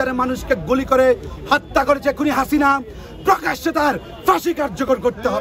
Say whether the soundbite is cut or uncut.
uncut